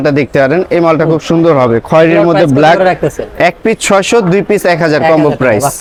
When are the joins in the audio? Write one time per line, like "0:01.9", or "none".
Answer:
none